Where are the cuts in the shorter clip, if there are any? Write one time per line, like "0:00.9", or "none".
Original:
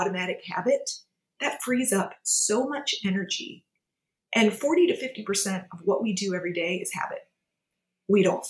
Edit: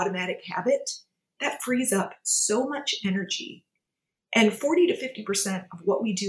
none